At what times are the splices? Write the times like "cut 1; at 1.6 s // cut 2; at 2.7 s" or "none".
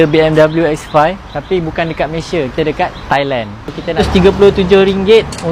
cut 1; at 4.1 s